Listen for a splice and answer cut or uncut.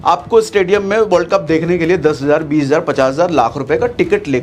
uncut